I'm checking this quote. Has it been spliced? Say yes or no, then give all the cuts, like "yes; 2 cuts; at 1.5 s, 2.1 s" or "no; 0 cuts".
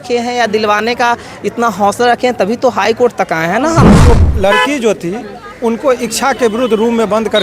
yes; 1 cut; at 4.0 s